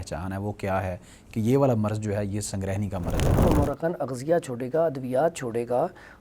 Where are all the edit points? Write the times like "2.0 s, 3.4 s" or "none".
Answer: 3.4 s